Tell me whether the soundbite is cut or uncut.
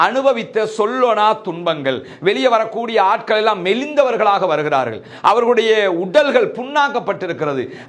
uncut